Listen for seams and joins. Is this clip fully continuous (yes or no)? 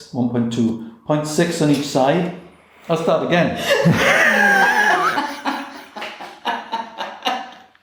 yes